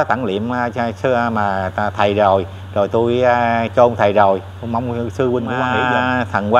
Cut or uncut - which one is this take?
cut